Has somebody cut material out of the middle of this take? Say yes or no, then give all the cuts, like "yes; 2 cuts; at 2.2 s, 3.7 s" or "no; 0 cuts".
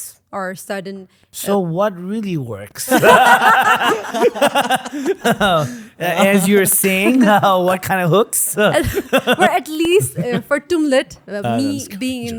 no; 0 cuts